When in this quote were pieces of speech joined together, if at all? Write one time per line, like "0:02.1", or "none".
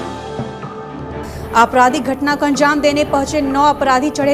0:00.9